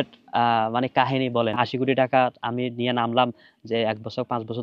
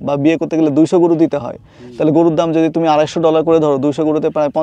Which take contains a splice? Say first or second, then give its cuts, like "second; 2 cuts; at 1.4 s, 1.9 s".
first; 1 cut; at 1.6 s